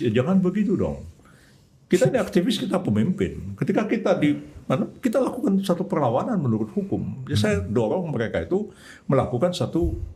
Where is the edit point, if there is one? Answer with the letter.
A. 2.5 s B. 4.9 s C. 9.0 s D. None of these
D